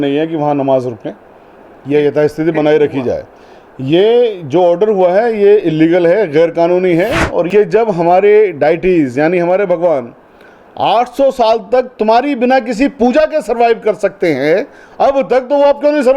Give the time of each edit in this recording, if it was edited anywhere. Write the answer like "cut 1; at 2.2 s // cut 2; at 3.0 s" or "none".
cut 1; at 7.5 s